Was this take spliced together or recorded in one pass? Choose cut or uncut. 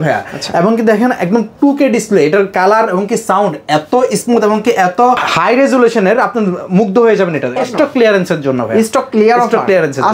cut